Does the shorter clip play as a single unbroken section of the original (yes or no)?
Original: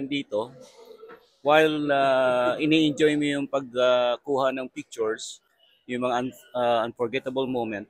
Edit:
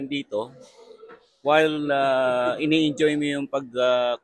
yes